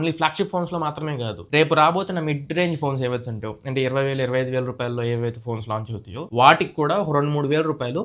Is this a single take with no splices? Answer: no; 1 cut; at 1.4 s

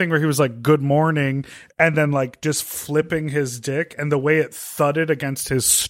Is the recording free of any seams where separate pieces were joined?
yes; 0 cuts

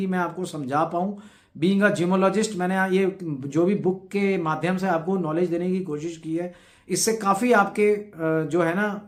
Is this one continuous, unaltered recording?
yes; 0 cuts

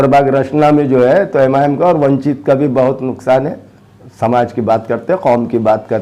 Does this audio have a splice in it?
no; 0 cuts

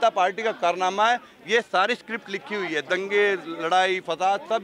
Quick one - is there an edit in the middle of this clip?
no; 0 cuts

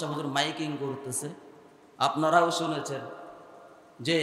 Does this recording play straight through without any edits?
yes; 0 cuts

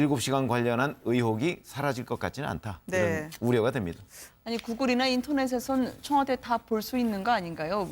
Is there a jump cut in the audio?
yes; 1 cut; at 2.1 s

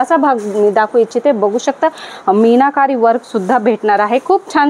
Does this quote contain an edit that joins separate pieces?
yes; 1 cut; at 2.1 s

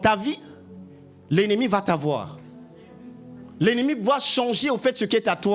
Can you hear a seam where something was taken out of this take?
no; 0 cuts

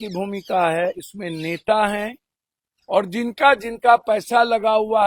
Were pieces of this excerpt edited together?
no; 0 cuts

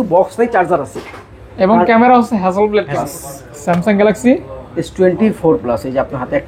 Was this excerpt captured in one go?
no; 1 cut; at 3.2 s

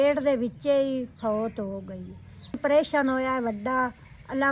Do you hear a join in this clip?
yes; 1 cut; at 2.6 s

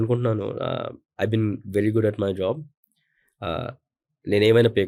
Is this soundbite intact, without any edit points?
yes; 0 cuts

